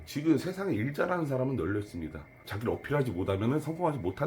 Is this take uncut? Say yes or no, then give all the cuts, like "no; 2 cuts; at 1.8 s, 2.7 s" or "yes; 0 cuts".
yes; 0 cuts